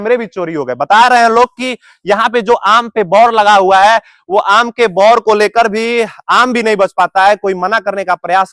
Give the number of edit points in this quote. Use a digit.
0